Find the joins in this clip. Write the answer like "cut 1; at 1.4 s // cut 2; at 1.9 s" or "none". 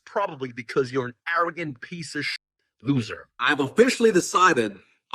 cut 1; at 3.4 s

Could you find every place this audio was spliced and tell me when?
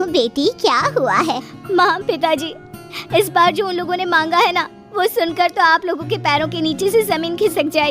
cut 1; at 1.5 s

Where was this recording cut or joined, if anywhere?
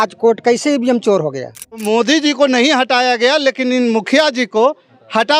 cut 1; at 1.8 s

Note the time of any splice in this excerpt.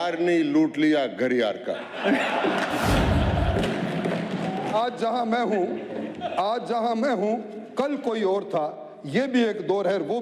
none

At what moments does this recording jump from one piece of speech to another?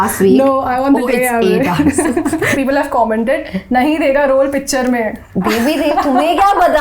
cut 1; at 2.5 s // cut 2; at 5.2 s

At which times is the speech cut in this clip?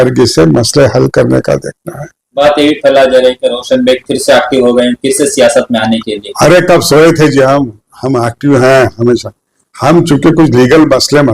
cut 1; at 2.2 s

